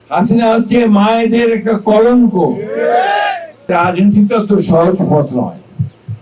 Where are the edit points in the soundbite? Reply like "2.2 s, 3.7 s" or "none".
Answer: 3.7 s